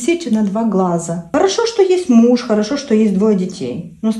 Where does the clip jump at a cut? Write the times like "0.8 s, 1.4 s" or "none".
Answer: 1.3 s